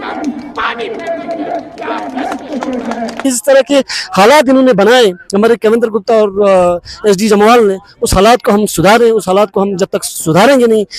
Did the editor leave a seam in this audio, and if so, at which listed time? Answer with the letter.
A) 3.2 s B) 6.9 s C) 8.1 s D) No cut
A